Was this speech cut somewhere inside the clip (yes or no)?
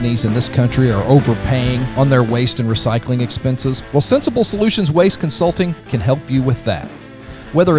yes